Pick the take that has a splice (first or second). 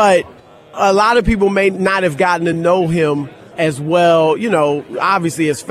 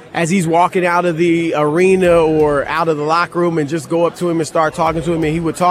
first